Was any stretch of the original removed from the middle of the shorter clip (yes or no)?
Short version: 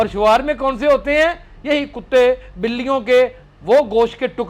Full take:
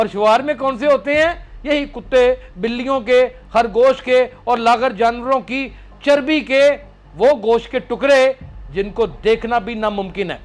yes